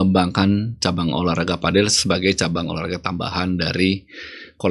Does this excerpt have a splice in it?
no; 0 cuts

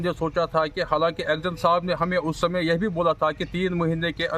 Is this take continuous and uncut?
yes; 0 cuts

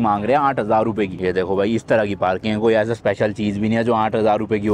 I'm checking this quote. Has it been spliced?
yes; 1 cut; at 1.2 s

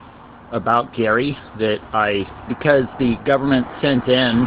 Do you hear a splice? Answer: no; 0 cuts

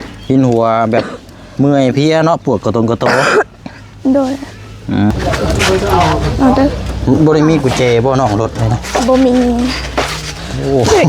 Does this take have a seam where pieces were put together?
yes; 1 cut; at 5.1 s

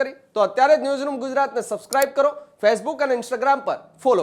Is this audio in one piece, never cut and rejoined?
yes; 0 cuts

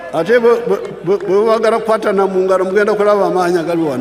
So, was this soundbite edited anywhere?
no; 0 cuts

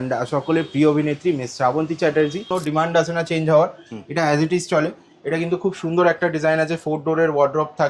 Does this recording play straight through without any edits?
no; 1 cut; at 2.5 s

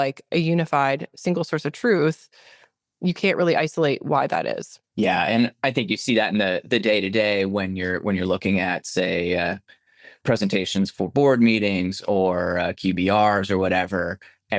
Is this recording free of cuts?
yes; 0 cuts

